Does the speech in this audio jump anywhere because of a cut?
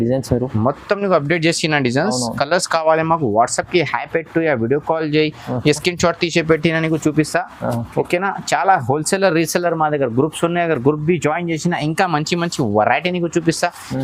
no; 0 cuts

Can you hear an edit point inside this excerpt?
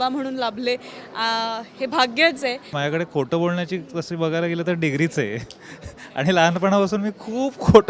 yes; 1 cut; at 2.7 s

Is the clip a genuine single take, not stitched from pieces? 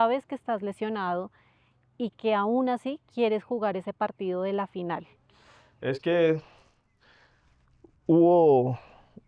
yes; 0 cuts

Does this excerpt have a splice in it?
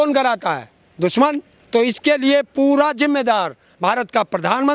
yes; 1 cut; at 1.5 s

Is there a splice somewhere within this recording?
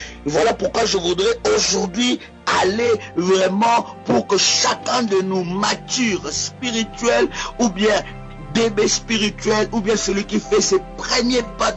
yes; 2 cuts; at 3.1 s, 9.5 s

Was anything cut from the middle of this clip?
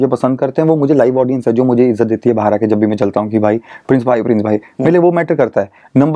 no; 0 cuts

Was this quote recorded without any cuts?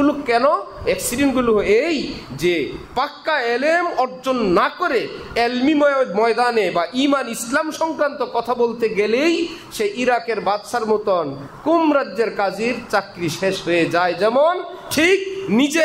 yes; 0 cuts

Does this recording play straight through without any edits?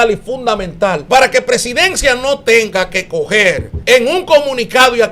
no; 2 cuts; at 1.0 s, 3.7 s

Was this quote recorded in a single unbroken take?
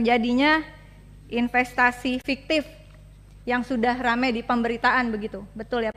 yes; 0 cuts

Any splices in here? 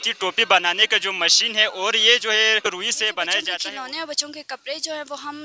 yes; 1 cut; at 3.5 s

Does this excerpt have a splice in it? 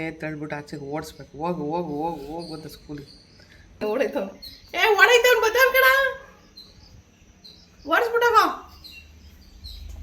yes; 1 cut; at 3.8 s

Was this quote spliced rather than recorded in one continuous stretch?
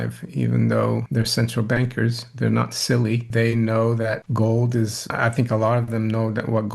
yes; 4 cuts; at 1.1 s, 3.3 s, 4.2 s, 5.0 s

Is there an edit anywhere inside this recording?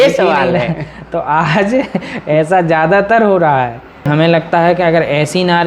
yes; 1 cut; at 4.1 s

